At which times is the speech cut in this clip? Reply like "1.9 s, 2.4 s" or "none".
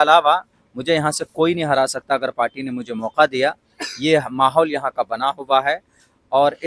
none